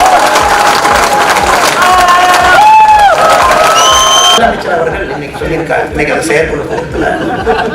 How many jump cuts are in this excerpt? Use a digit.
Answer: 1